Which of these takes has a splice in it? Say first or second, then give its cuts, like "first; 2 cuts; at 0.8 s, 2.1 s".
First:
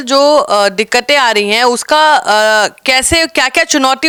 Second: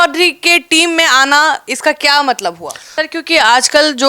second; 1 cut; at 2.8 s